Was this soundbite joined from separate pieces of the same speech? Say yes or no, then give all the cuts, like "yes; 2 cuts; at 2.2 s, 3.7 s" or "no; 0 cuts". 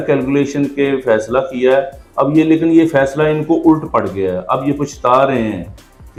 no; 0 cuts